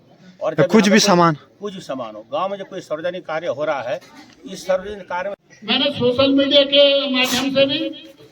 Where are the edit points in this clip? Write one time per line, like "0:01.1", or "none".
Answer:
0:05.3